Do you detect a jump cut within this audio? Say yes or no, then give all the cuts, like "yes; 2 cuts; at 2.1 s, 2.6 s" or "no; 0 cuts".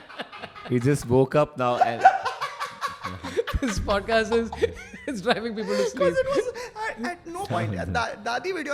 no; 0 cuts